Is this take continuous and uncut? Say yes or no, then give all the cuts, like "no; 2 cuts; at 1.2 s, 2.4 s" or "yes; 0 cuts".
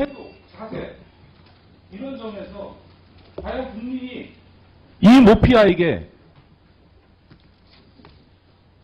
no; 1 cut; at 5.8 s